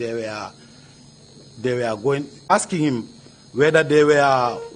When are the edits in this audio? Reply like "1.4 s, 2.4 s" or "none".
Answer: 2.5 s